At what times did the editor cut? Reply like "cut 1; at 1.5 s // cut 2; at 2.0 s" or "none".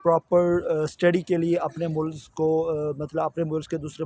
none